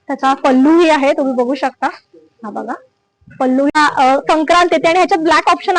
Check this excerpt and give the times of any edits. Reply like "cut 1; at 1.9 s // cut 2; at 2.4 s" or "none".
cut 1; at 3.8 s

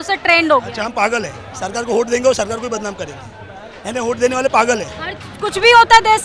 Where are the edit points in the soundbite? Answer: none

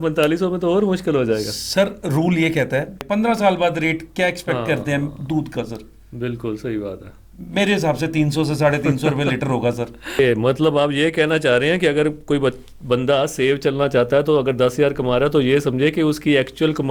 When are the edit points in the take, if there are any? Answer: cut 1; at 3.0 s // cut 2; at 10.2 s

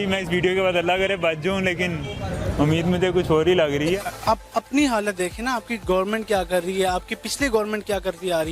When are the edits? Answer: cut 1; at 4.1 s

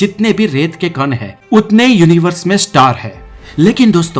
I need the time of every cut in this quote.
cut 1; at 1.3 s

